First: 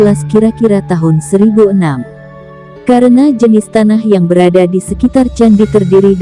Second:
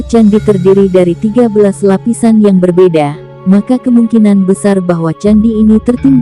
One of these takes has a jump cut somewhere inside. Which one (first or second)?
first